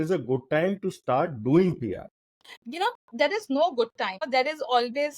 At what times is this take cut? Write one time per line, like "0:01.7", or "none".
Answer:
0:02.6
0:04.2